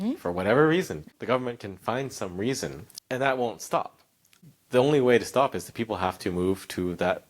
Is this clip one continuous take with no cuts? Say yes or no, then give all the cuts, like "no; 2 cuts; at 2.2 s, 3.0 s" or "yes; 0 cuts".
no; 3 cuts; at 1.0 s, 2.9 s, 4.4 s